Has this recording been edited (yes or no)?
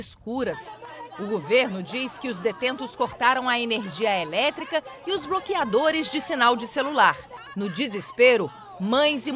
no